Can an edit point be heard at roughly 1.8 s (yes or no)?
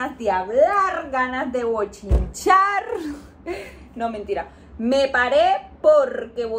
no